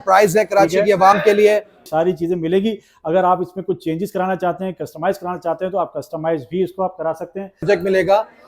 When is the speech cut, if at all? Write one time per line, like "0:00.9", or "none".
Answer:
0:01.9
0:07.6